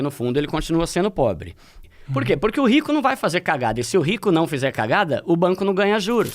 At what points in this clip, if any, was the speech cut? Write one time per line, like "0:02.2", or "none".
0:01.8